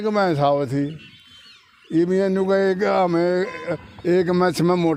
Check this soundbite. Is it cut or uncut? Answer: uncut